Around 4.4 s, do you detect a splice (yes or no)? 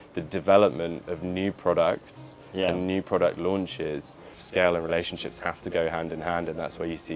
yes